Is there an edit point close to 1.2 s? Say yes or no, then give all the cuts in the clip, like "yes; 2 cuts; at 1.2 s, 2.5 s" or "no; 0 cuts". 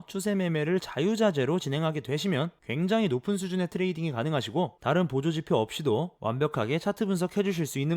no; 3 cuts; at 2.6 s, 4.8 s, 6.1 s